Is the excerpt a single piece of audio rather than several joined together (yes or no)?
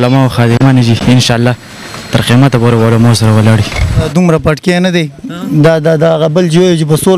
no